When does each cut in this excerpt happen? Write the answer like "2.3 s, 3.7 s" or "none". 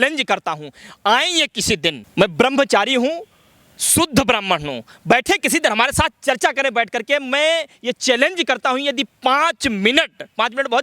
2.0 s